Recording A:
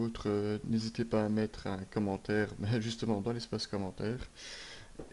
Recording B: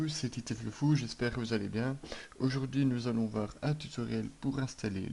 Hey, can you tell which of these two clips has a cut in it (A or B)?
A